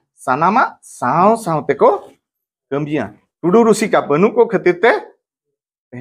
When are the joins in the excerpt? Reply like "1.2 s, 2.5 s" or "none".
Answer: 3.2 s